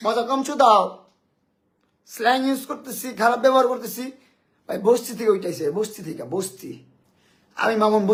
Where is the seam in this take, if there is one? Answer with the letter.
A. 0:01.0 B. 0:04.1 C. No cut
C